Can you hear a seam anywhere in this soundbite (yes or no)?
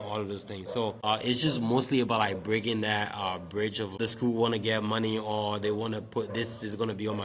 yes